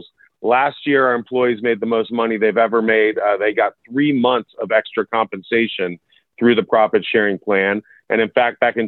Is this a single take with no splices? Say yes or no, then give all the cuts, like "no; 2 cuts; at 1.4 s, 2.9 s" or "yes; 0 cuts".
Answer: yes; 0 cuts